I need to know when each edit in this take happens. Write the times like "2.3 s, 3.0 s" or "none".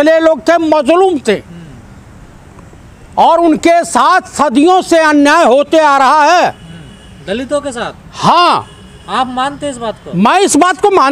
none